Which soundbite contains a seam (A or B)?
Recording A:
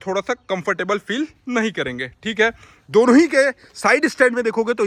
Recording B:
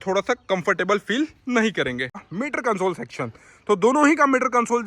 B